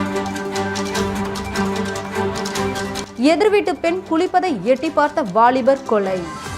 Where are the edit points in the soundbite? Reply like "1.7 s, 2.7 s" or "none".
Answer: 3.0 s